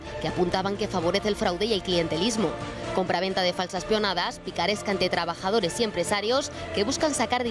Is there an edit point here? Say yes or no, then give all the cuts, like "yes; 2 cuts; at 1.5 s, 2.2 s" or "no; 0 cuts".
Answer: no; 0 cuts